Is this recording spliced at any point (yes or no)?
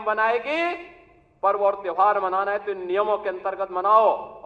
no